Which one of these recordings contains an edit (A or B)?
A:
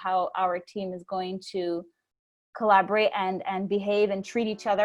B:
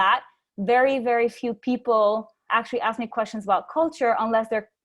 B